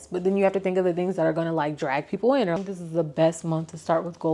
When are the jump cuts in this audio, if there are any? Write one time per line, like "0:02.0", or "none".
0:02.6